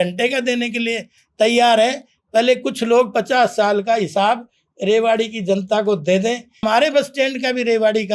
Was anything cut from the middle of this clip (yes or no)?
yes